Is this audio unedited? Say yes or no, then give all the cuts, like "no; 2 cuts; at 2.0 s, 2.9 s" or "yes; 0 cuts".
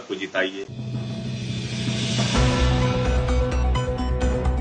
yes; 0 cuts